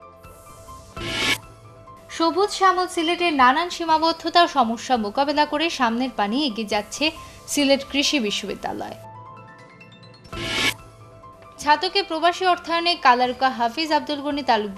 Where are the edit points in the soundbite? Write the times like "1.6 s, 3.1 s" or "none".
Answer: 0.9 s